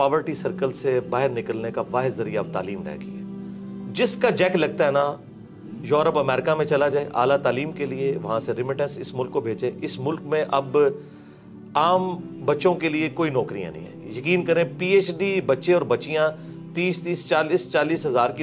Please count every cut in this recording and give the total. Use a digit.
0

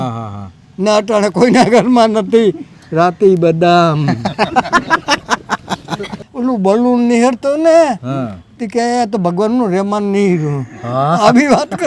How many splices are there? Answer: 1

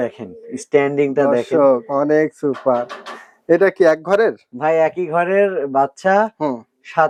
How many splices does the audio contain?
0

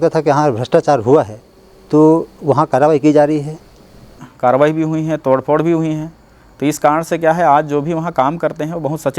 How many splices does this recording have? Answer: 1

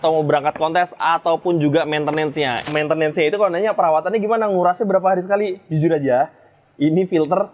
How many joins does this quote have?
1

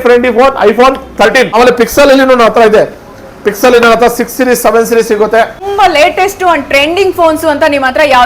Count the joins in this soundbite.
2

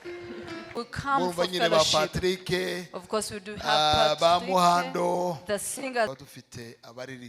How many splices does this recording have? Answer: 2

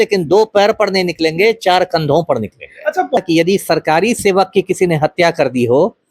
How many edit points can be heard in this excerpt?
1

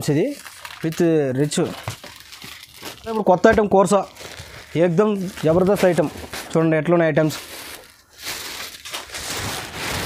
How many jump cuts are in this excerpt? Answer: 1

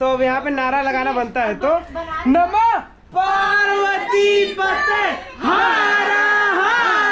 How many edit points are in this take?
0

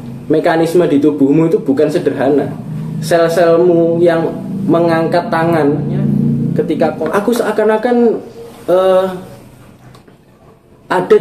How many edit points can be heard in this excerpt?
1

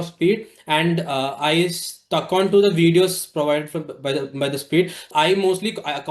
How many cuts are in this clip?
1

